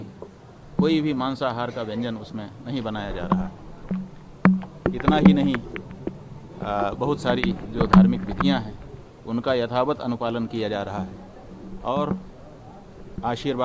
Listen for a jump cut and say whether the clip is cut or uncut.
uncut